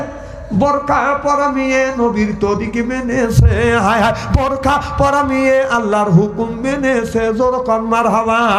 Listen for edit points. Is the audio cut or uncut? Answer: uncut